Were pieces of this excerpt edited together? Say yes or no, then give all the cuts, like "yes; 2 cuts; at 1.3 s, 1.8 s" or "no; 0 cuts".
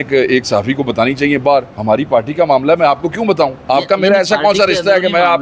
no; 0 cuts